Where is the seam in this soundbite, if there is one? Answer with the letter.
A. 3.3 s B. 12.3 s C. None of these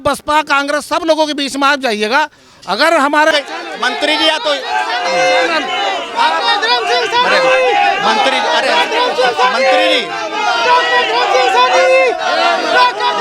A